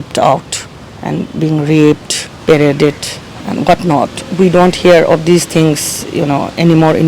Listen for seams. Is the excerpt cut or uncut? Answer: uncut